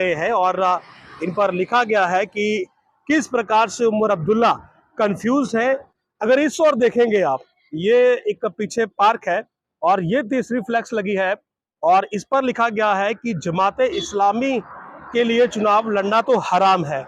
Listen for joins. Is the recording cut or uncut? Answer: cut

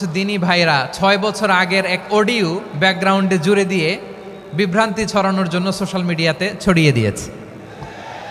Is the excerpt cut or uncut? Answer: uncut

